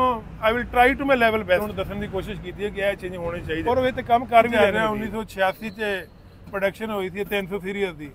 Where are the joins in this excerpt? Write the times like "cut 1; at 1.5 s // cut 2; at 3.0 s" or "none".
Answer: cut 1; at 1.6 s // cut 2; at 3.6 s // cut 3; at 4.5 s